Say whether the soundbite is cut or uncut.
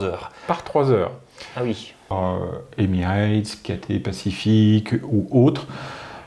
cut